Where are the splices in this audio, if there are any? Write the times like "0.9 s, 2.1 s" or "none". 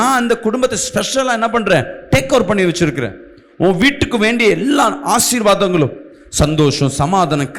none